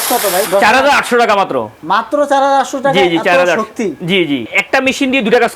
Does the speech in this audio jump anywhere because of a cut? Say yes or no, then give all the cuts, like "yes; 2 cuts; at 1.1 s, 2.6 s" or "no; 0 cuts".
yes; 1 cut; at 4.5 s